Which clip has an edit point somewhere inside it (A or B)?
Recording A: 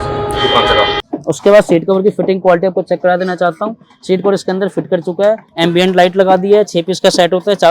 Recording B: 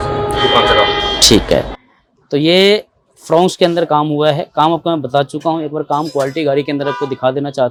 A